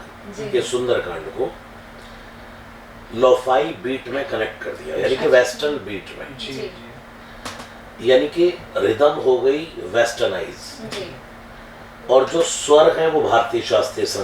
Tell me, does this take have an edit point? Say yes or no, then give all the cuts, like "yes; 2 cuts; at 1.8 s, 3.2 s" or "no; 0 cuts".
no; 0 cuts